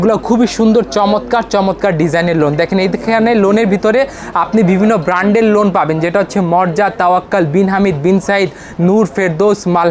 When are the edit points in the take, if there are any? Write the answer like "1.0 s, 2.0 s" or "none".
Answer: none